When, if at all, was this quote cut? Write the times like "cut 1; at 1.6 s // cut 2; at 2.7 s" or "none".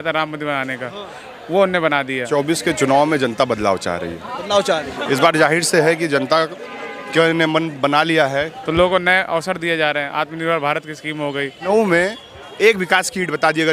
cut 1; at 2.3 s // cut 2; at 8.6 s // cut 3; at 11.6 s

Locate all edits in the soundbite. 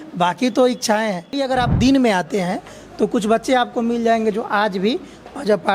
cut 1; at 1.4 s

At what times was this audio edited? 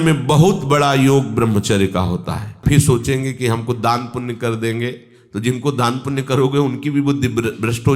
cut 1; at 2.6 s

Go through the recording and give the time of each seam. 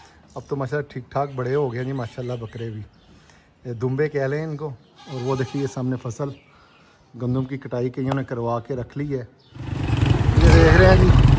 cut 1; at 9.8 s

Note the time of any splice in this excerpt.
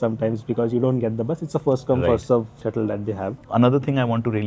cut 1; at 3.3 s

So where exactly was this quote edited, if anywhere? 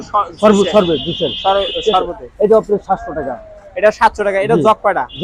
none

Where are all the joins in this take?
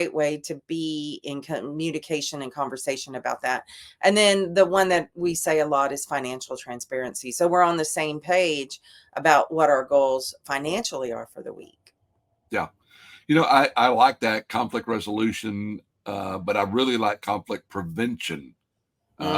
none

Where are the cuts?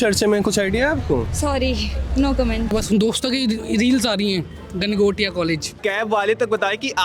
cut 1; at 2.7 s // cut 2; at 5.8 s

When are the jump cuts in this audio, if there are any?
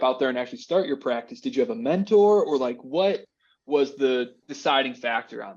cut 1; at 4.4 s

